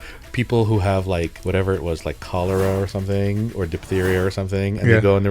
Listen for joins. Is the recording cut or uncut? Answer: cut